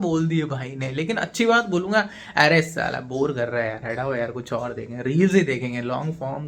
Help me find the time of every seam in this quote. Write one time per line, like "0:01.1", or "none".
none